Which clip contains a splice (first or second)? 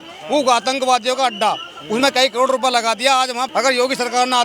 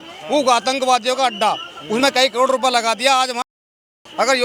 first